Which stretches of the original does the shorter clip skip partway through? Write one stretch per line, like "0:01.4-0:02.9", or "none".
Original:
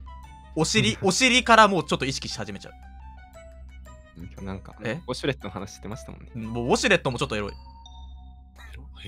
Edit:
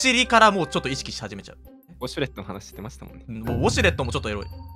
0:03.1-0:05.0